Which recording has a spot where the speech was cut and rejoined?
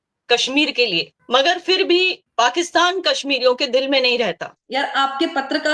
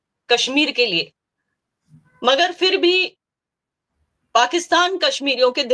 first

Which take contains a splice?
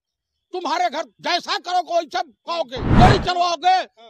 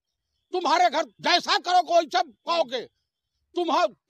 first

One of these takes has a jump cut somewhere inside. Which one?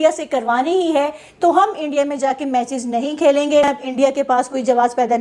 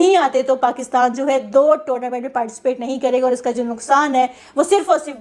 first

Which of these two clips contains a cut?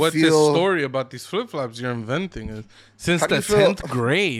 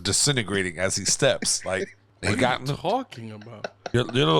second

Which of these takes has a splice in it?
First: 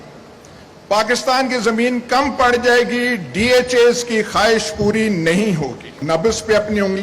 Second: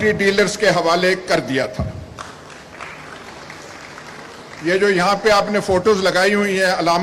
first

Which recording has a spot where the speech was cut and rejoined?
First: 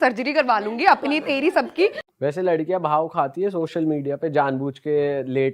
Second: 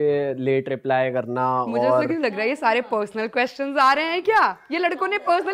first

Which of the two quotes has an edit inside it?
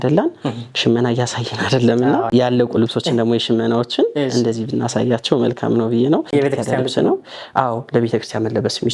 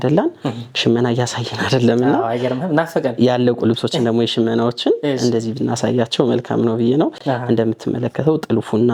first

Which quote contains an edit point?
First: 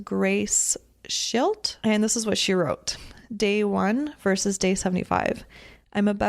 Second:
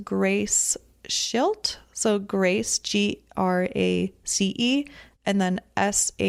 first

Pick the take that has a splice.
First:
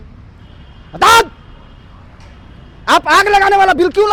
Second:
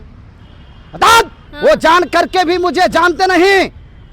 second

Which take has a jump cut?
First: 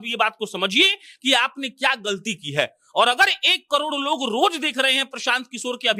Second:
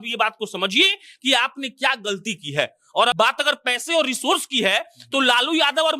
second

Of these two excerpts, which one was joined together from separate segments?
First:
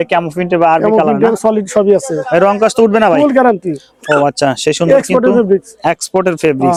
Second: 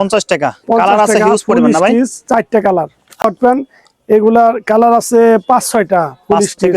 second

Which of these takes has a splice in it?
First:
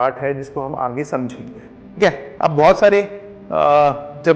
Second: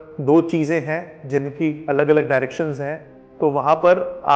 first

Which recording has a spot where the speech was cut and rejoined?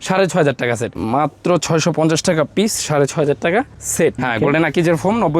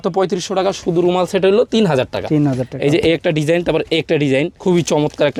first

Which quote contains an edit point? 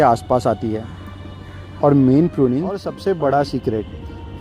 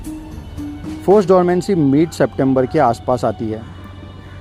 first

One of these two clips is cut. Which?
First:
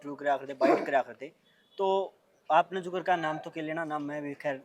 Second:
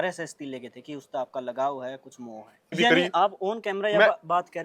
second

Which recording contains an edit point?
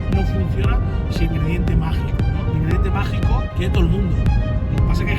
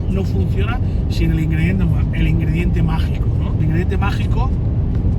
first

